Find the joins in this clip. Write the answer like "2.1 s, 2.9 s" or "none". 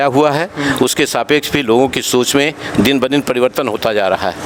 none